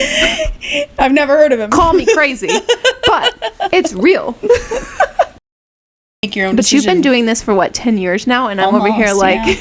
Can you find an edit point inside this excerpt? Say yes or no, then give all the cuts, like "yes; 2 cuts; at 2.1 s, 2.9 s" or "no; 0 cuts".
yes; 1 cut; at 5.8 s